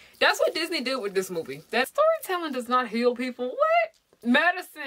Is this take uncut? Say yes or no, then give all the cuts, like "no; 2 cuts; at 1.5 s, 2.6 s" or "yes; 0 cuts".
no; 1 cut; at 1.9 s